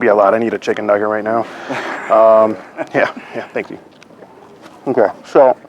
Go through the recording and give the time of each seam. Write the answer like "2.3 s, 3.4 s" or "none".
none